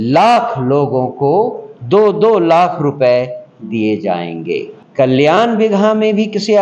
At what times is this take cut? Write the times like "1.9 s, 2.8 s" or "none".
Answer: 4.8 s

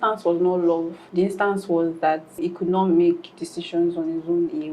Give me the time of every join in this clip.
1.0 s, 2.4 s

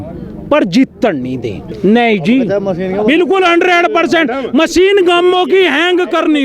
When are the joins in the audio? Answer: 1.7 s

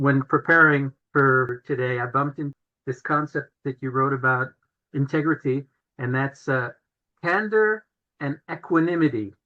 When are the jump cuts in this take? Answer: 1.3 s, 2.6 s, 3.5 s, 4.8 s

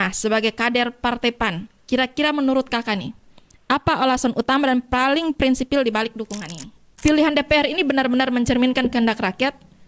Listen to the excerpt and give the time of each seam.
6.8 s

